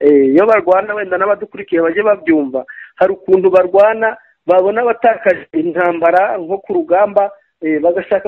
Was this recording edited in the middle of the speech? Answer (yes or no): no